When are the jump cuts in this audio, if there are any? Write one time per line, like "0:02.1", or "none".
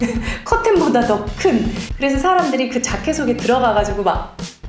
0:01.8